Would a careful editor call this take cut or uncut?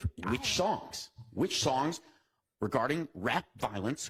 uncut